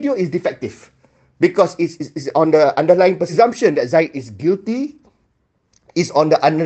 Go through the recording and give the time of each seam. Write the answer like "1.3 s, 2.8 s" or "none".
3.3 s